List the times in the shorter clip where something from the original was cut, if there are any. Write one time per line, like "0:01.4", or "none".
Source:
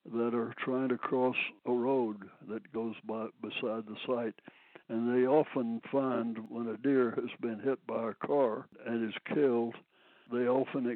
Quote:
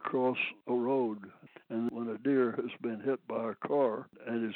0:01.8